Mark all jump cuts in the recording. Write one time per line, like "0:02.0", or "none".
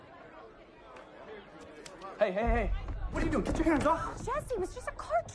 0:04.5